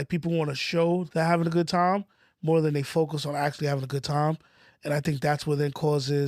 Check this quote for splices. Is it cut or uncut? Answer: cut